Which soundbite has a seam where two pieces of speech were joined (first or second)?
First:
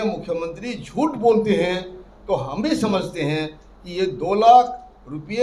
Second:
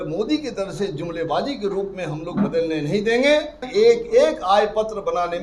second